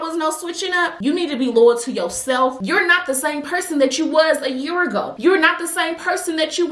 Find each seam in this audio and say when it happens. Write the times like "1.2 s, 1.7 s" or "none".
1.0 s, 2.6 s